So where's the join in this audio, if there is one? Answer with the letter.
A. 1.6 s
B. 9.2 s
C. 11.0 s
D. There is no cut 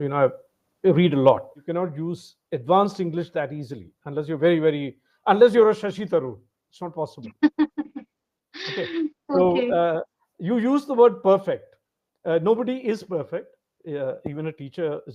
A